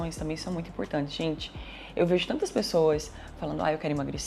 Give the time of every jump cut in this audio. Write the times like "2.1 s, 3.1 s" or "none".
none